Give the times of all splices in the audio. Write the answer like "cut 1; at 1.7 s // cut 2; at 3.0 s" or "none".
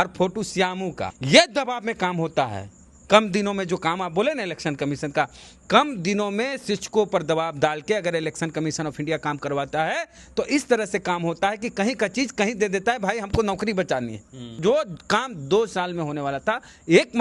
cut 1; at 1.1 s // cut 2; at 14.6 s